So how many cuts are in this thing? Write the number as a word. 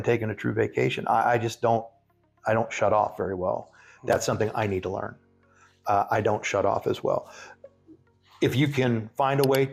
zero